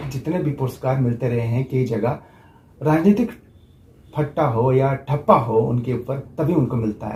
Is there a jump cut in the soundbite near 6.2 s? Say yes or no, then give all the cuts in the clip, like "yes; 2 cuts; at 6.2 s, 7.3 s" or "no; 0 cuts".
no; 0 cuts